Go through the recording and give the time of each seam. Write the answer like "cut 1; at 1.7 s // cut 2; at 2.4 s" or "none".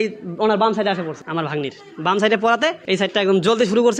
cut 1; at 1.2 s // cut 2; at 2.8 s